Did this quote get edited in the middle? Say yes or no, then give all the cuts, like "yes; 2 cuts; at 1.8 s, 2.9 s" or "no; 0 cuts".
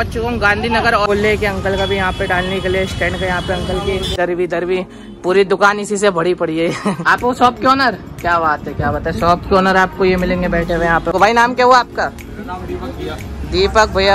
yes; 4 cuts; at 1.1 s, 4.2 s, 7.0 s, 11.1 s